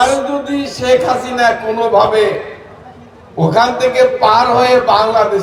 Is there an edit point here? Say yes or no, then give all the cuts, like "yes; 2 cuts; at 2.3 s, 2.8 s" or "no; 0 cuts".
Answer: no; 0 cuts